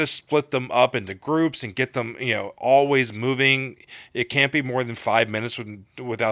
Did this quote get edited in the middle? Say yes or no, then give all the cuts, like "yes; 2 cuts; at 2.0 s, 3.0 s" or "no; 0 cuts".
no; 0 cuts